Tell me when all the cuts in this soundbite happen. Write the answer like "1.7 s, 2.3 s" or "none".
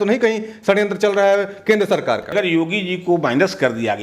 2.3 s